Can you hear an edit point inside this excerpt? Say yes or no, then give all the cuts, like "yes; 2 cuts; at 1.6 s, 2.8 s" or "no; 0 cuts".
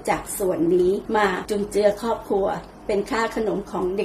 yes; 1 cut; at 1.2 s